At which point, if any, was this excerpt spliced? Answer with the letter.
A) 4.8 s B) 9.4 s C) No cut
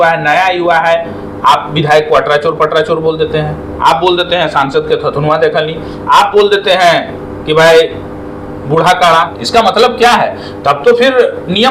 B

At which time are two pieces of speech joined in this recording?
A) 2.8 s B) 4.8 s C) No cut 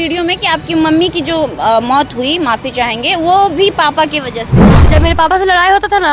B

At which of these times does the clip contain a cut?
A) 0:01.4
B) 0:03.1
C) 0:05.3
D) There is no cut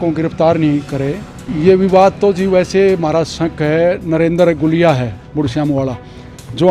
A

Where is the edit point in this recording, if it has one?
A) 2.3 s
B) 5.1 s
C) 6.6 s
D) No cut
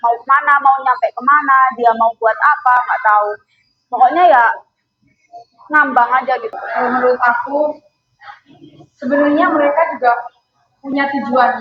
C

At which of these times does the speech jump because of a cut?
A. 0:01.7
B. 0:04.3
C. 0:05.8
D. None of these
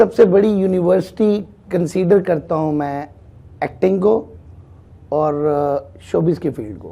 D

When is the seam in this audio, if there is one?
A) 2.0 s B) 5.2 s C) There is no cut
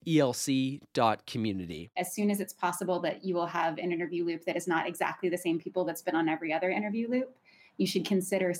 A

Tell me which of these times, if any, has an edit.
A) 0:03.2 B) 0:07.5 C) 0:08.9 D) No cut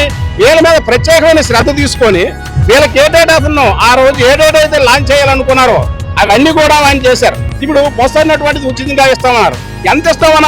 B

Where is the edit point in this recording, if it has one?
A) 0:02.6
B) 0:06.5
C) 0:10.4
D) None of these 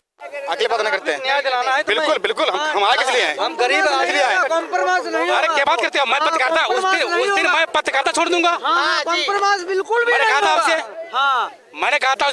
D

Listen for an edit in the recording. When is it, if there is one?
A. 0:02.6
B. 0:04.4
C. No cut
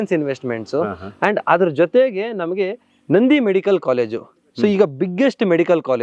C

